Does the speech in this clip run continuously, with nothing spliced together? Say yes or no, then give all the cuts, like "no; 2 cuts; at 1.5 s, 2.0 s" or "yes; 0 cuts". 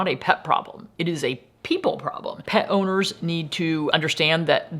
no; 2 cuts; at 2.4 s, 3.9 s